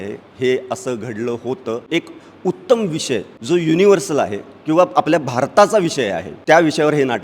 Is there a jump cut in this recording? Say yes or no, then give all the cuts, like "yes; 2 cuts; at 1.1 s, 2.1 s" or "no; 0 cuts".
yes; 3 cuts; at 1.8 s, 3.3 s, 6.3 s